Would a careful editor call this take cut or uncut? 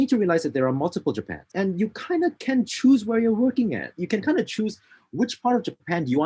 cut